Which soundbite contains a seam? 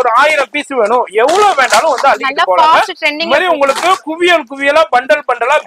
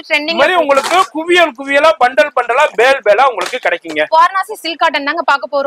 second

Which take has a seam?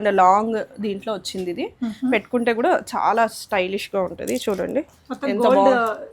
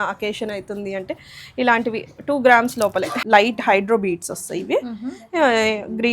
second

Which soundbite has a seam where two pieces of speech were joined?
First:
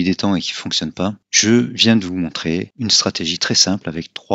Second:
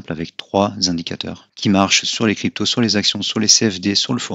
first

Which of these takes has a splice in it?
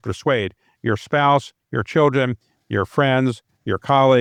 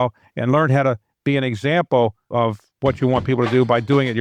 second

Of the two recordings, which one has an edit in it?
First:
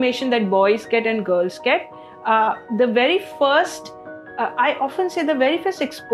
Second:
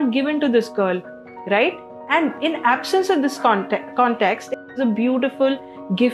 second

